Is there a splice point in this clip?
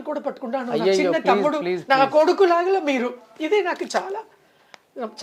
no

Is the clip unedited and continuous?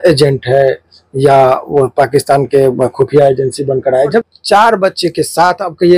no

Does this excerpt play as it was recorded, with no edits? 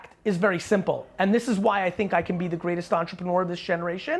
yes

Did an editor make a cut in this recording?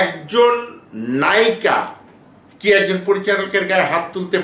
no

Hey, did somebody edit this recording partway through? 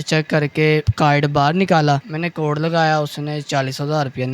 yes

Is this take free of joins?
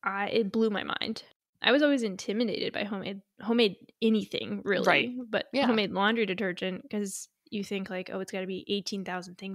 no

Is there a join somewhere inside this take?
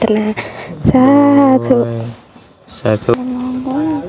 yes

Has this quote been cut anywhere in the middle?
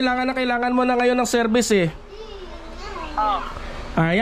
no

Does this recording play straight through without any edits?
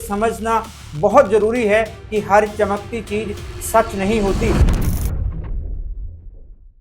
no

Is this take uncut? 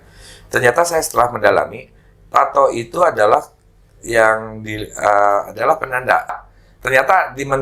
no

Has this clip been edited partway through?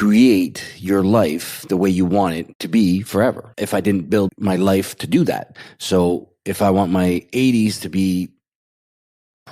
no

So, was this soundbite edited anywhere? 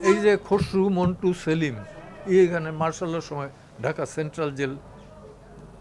no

